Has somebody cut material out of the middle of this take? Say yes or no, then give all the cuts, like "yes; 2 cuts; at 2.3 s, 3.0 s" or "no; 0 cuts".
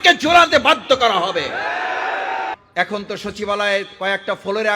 yes; 1 cut; at 2.6 s